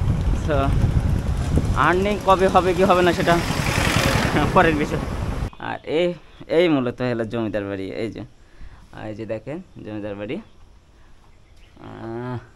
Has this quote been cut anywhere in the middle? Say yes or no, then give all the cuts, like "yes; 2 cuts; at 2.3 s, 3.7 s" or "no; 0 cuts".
yes; 1 cut; at 5.5 s